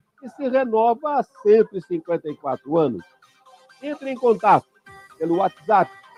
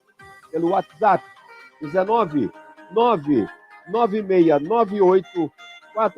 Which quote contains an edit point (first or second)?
second